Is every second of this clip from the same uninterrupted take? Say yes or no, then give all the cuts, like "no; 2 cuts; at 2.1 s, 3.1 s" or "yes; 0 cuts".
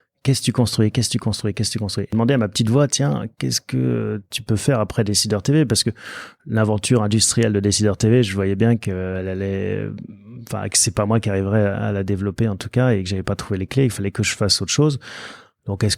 no; 1 cut; at 2.1 s